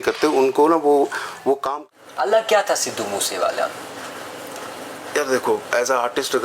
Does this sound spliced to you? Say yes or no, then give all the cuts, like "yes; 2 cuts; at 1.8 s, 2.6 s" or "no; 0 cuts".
yes; 1 cut; at 1.6 s